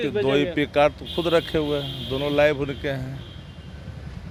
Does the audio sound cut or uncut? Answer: uncut